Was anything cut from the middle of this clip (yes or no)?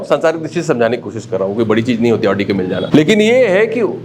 yes